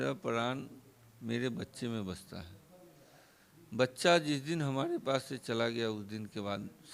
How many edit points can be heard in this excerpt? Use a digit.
0